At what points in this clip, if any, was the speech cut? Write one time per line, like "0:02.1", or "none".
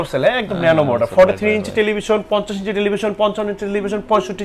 none